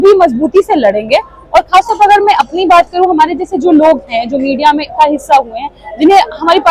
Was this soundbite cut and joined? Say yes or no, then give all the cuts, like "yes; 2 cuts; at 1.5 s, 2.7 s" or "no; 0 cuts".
no; 0 cuts